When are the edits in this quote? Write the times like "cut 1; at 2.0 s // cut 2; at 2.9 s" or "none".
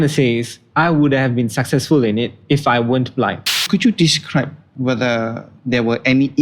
cut 1; at 3.5 s // cut 2; at 4.6 s // cut 3; at 5.5 s